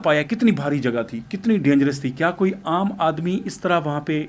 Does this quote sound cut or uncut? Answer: uncut